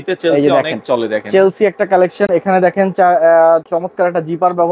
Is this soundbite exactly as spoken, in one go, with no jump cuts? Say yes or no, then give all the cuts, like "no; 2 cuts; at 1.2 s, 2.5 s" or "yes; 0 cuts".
yes; 0 cuts